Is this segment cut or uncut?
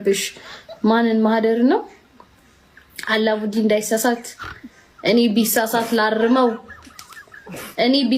uncut